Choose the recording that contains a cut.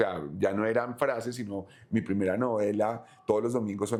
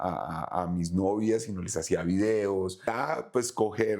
second; 1 cut; at 2.9 s

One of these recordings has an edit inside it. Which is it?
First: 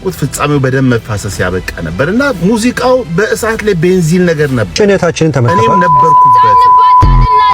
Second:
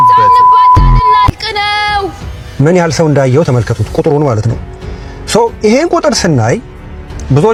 first; 1 cut; at 4.7 s

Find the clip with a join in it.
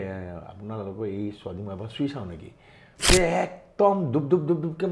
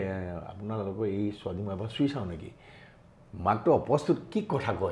first; 1 cut; at 3.0 s

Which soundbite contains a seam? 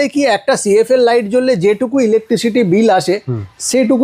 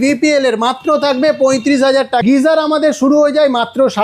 second; 1 cut; at 2.2 s

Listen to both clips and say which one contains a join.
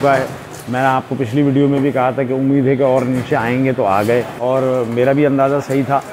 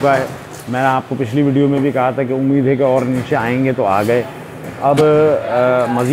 first; 1 cut; at 4.3 s

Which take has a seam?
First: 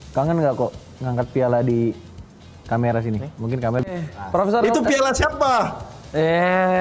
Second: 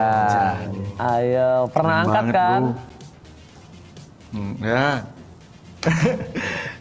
first; 1 cut; at 4.0 s

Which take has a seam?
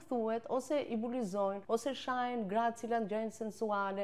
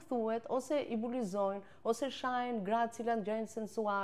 first; 1 cut; at 1.6 s

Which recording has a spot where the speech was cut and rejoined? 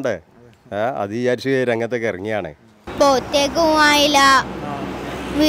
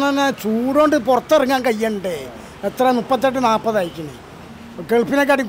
first; 1 cut; at 2.8 s

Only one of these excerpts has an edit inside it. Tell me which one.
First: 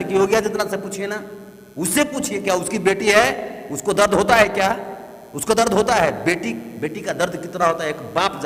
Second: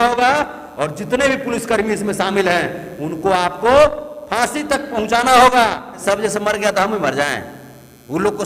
second; 1 cut; at 6.0 s

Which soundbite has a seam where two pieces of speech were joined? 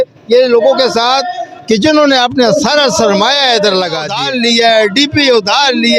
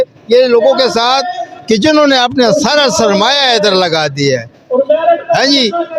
first; 1 cut; at 4.2 s

